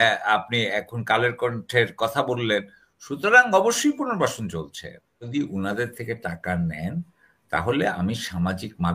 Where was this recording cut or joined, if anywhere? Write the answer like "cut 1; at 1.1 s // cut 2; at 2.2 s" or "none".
cut 1; at 5.2 s